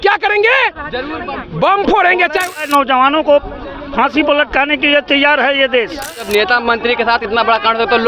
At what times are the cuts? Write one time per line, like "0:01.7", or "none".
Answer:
0:02.5
0:06.3